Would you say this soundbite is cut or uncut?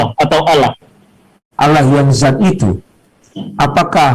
cut